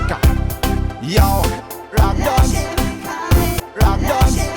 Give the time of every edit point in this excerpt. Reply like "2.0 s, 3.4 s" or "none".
none

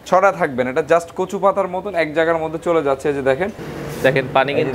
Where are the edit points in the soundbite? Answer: 3.6 s

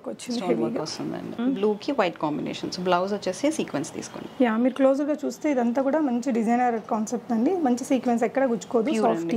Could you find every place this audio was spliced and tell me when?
1.4 s

